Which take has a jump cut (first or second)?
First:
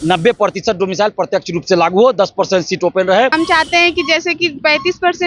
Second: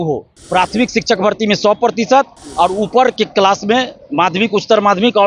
first